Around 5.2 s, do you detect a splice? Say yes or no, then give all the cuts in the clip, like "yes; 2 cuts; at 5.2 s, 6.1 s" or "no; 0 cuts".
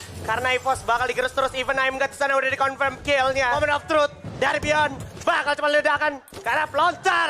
no; 1 cut; at 3.6 s